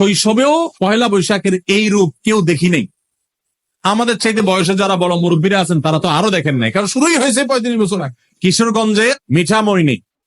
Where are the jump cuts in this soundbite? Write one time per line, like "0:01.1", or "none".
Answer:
0:08.3